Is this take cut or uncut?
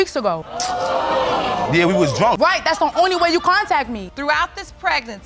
cut